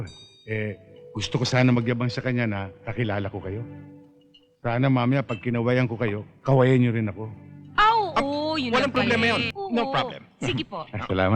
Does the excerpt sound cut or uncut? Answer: cut